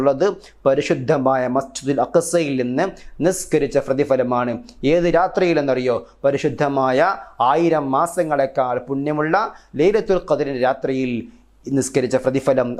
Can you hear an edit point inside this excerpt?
no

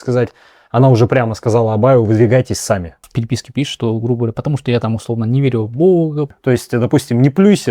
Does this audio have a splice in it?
yes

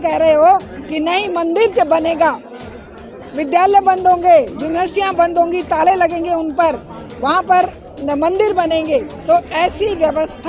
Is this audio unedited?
yes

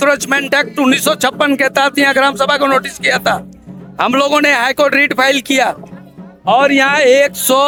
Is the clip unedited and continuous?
yes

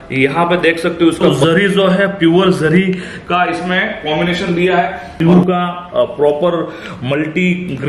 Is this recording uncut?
no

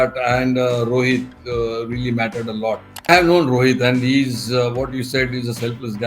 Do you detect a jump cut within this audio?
yes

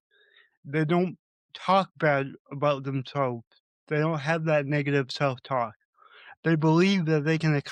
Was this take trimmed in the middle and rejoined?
no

